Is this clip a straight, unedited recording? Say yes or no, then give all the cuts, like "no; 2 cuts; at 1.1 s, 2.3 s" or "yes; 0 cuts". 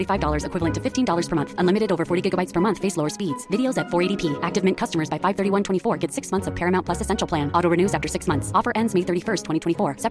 yes; 0 cuts